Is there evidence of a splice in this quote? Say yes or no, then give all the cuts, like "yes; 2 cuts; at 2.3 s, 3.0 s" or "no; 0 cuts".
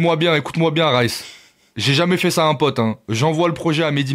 no; 0 cuts